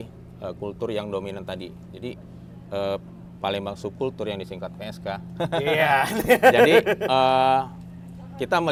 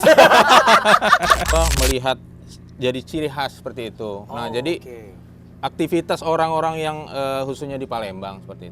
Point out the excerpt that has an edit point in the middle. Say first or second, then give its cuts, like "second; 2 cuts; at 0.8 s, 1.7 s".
second; 1 cut; at 1.5 s